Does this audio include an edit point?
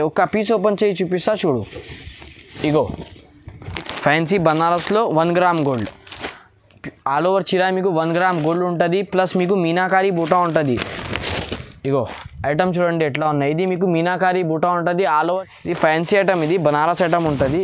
yes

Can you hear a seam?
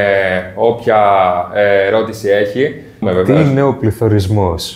no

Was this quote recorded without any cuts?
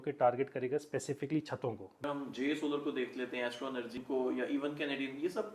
no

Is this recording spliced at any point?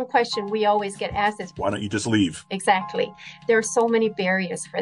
yes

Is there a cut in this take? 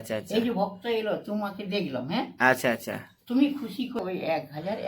yes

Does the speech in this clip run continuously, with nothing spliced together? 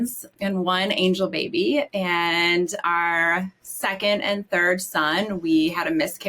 no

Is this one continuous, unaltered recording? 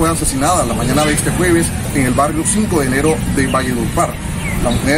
yes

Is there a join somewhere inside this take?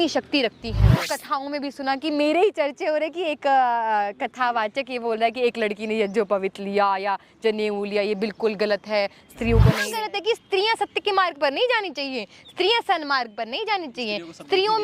yes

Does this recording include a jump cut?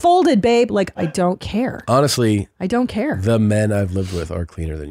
yes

